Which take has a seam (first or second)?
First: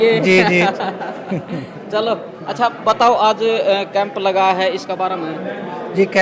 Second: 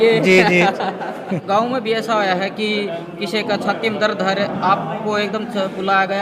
second